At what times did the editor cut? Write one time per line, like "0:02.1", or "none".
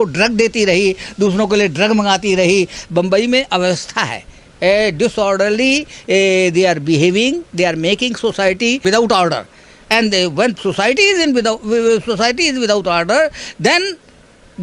0:02.7